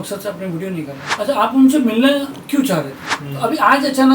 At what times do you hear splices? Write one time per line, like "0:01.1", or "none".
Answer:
0:01.0
0:03.2